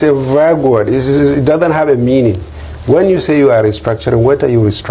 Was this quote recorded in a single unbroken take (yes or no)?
yes